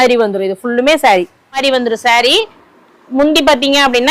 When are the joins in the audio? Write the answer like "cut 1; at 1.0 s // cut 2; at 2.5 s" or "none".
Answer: cut 1; at 1.6 s